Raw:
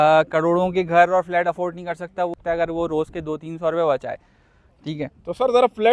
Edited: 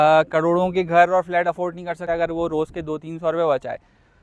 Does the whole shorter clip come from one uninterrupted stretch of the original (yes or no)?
no